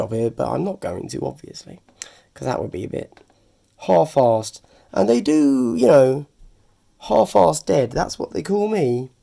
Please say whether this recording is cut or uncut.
uncut